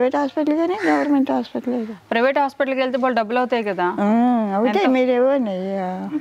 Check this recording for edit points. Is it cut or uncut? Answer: uncut